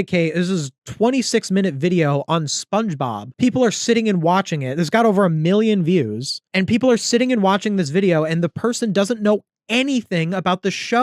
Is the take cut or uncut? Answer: uncut